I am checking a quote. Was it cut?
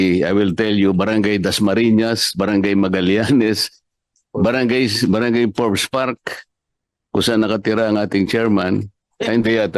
no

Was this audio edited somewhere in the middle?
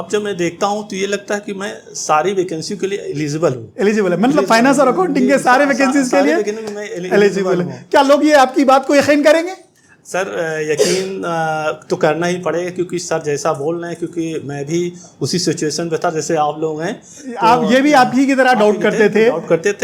no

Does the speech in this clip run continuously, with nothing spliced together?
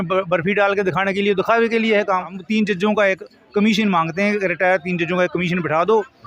no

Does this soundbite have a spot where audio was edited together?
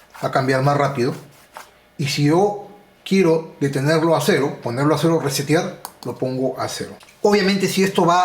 yes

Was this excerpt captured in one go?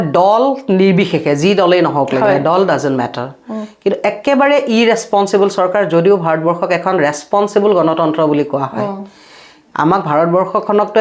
yes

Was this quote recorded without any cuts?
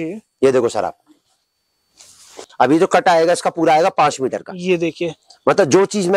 no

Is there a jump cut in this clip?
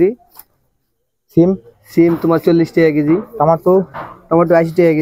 no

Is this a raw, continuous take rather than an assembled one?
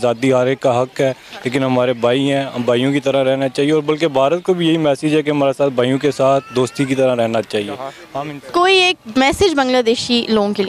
yes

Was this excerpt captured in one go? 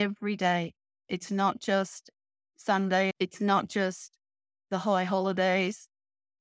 no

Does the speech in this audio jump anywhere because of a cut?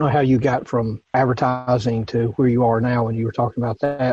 yes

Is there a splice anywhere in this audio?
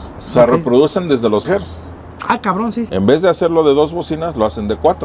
yes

